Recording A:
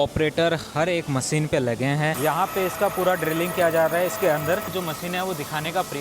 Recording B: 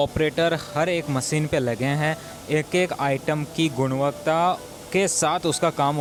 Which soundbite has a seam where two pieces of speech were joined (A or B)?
A